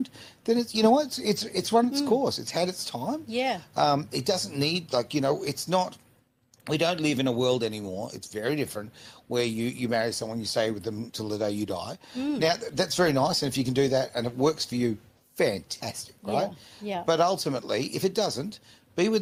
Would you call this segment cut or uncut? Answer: uncut